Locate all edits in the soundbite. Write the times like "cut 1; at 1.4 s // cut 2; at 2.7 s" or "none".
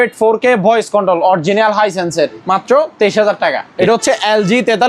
cut 1; at 2.4 s // cut 2; at 3.7 s